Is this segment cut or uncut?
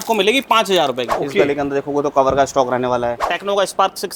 cut